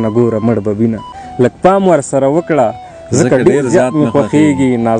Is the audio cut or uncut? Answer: cut